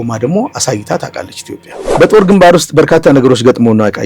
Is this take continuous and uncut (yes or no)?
no